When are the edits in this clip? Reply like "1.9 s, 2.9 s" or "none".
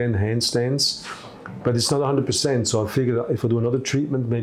none